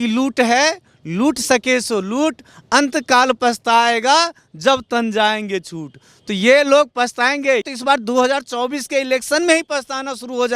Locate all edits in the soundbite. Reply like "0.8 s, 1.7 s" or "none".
7.6 s